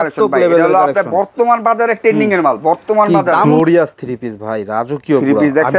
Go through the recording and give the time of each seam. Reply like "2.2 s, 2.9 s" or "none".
3.5 s

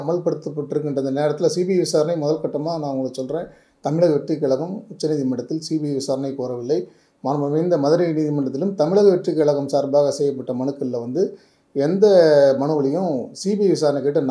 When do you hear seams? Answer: none

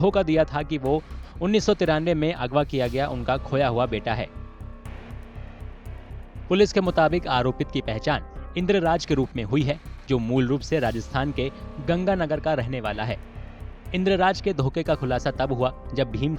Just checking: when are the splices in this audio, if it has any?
4.3 s, 6.4 s

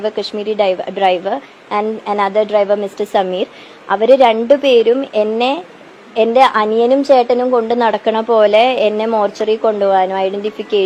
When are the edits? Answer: none

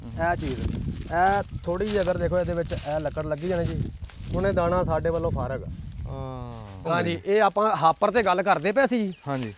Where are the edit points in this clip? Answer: 6.8 s

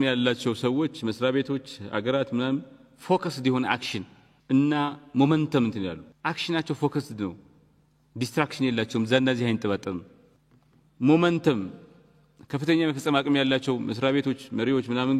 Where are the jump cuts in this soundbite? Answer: none

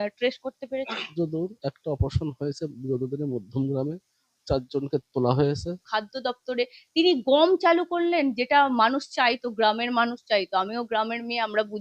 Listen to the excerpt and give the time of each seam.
1.1 s, 5.8 s

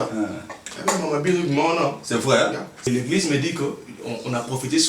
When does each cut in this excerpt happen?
2.9 s

